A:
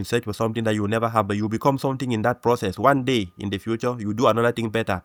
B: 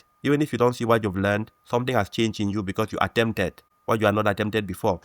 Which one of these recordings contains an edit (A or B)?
B